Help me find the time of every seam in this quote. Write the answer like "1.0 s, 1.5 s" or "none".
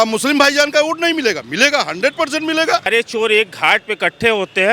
2.9 s